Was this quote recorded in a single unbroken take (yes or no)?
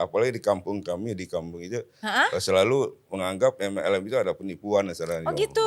yes